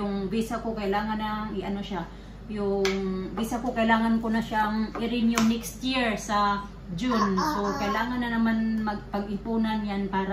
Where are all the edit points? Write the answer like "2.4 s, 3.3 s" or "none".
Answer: none